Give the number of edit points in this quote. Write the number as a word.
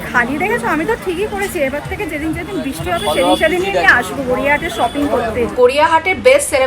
one